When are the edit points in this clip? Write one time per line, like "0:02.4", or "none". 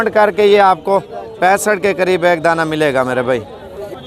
none